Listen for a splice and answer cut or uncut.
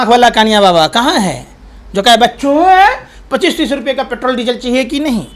uncut